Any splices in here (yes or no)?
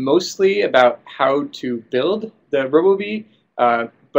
no